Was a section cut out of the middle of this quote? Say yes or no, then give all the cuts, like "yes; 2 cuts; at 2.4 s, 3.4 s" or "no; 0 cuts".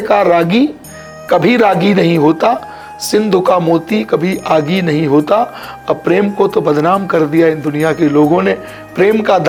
no; 0 cuts